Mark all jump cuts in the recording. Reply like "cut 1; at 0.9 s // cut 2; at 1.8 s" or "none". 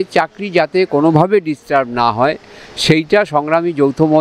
none